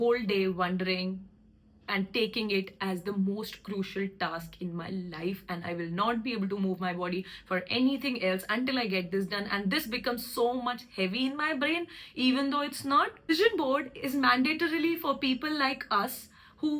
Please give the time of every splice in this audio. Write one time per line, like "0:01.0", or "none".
0:13.3